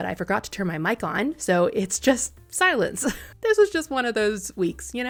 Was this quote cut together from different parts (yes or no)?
no